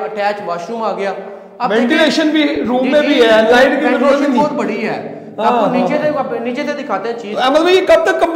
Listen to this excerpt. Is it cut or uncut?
uncut